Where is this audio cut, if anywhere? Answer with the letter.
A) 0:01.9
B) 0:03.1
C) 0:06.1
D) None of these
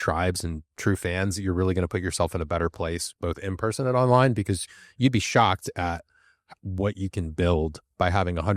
D